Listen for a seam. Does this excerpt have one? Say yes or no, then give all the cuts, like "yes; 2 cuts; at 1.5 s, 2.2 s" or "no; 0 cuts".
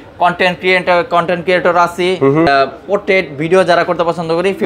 yes; 1 cut; at 2.5 s